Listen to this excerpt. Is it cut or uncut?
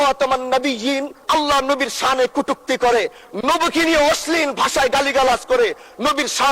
cut